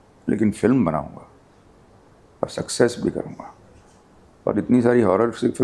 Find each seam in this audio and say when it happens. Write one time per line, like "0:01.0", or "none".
none